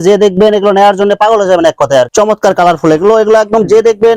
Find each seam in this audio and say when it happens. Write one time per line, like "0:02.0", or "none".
0:02.1